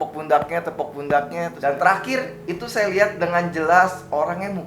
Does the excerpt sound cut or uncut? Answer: cut